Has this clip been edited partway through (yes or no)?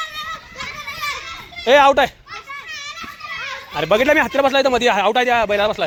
no